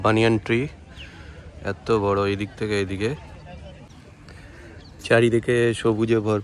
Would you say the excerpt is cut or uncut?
uncut